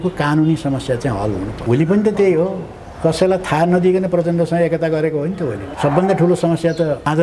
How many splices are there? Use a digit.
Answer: 2